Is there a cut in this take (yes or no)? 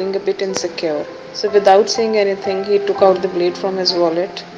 yes